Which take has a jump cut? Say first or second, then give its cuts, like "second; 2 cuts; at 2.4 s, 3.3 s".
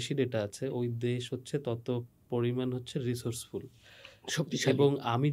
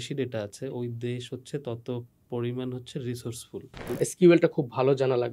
second; 1 cut; at 3.9 s